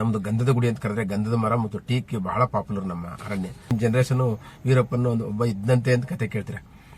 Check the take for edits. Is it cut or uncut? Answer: cut